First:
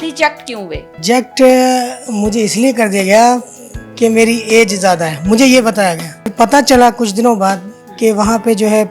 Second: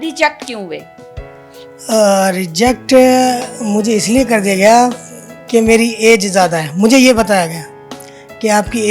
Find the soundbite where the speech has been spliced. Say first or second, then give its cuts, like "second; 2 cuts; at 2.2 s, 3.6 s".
first; 2 cuts; at 0.9 s, 6.3 s